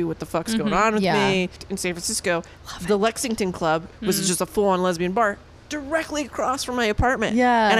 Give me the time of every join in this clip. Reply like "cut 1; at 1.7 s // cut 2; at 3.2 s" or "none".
cut 1; at 1.6 s // cut 2; at 3.9 s